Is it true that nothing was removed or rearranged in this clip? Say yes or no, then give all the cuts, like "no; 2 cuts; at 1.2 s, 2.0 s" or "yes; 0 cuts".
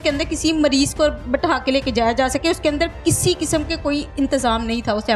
yes; 0 cuts